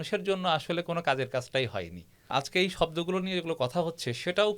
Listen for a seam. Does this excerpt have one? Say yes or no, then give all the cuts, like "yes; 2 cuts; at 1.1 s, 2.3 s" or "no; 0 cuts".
yes; 1 cut; at 2.2 s